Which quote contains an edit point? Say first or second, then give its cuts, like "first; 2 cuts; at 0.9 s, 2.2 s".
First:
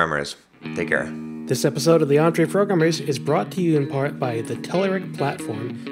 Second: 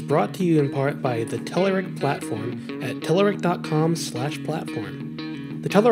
first; 1 cut; at 1.4 s